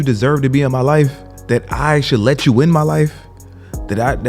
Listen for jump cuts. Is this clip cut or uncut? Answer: cut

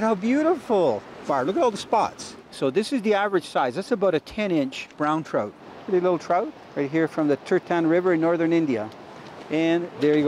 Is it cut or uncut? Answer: cut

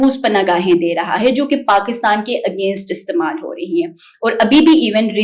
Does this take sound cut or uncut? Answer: uncut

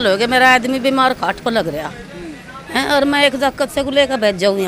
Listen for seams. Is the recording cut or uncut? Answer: uncut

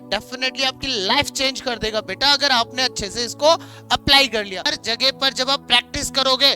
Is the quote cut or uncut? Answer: cut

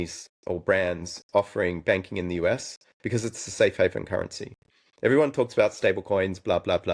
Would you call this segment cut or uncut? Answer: uncut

